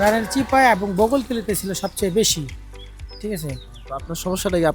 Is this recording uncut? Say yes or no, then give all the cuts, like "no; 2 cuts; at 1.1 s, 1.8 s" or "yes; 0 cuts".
yes; 0 cuts